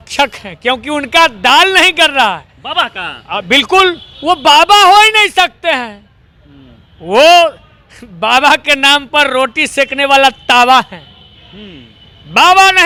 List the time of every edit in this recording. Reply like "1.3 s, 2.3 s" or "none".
none